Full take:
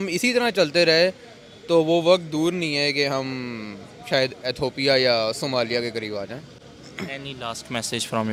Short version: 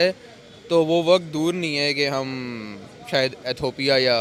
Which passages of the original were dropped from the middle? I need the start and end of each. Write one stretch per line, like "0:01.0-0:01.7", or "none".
none